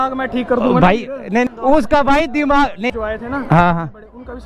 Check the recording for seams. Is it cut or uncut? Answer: cut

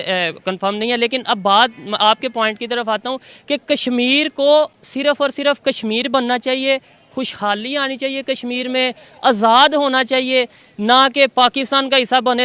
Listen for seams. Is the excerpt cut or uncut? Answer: uncut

